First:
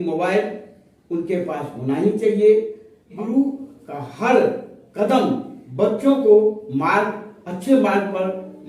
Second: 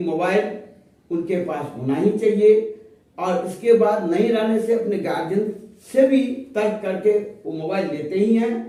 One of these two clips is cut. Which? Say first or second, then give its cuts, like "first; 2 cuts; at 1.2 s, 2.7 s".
first; 1 cut; at 3.1 s